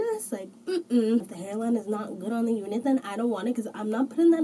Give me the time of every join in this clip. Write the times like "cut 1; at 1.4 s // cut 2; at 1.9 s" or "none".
cut 1; at 1.3 s